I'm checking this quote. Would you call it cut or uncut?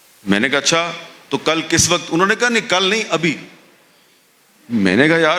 uncut